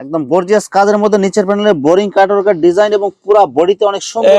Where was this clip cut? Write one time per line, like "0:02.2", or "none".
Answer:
none